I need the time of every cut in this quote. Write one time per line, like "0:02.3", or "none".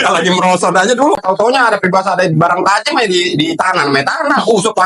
0:01.2